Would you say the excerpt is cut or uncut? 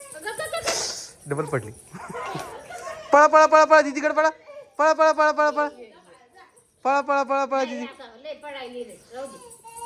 uncut